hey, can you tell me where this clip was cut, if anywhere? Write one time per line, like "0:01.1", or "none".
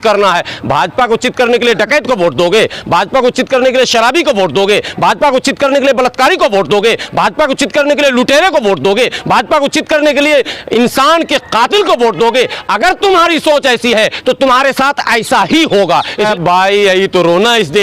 0:16.3